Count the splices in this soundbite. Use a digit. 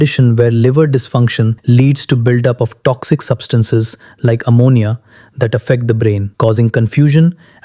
2